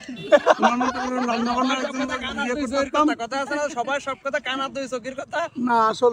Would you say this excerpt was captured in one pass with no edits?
yes; 0 cuts

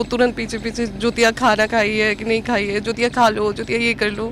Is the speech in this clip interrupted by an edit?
no; 0 cuts

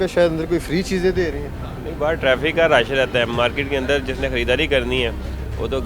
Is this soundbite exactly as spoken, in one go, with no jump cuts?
yes; 0 cuts

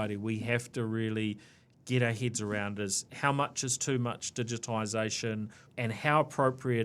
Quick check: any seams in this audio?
yes; 1 cut; at 5.7 s

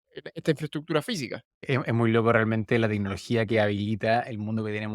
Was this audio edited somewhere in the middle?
yes; 1 cut; at 1.7 s

